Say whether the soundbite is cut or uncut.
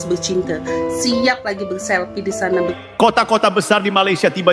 cut